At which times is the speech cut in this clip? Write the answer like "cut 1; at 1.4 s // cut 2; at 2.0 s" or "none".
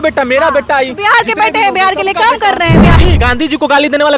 cut 1; at 3.0 s